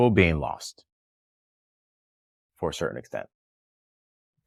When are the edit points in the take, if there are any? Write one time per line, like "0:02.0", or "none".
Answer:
none